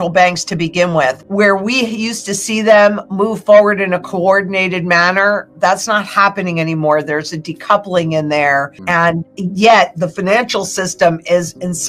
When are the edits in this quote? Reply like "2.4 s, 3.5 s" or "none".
8.8 s

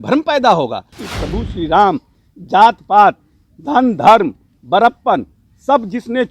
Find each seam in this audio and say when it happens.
1.0 s

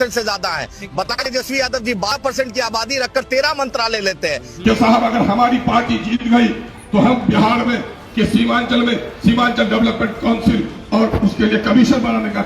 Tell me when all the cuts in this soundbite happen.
4.5 s

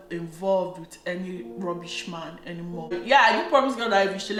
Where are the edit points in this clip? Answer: none

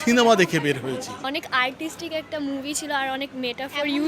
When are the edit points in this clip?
1.1 s

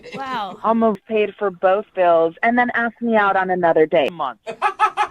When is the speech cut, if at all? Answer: 1.0 s, 4.1 s

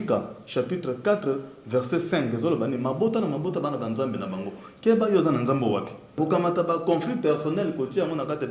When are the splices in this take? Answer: 6.2 s

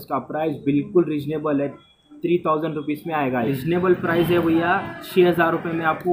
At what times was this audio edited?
3.5 s

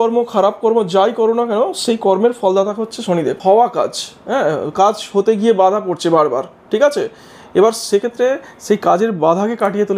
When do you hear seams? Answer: 3.4 s

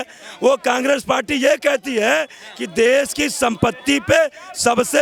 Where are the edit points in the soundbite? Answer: none

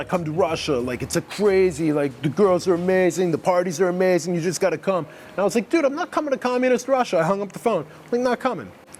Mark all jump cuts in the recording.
none

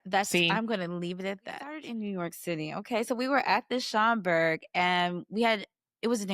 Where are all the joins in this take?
1.8 s

